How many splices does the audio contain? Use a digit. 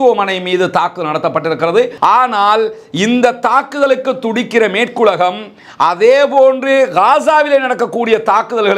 1